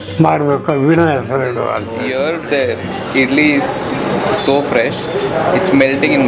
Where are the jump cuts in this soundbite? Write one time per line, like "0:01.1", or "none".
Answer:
0:02.1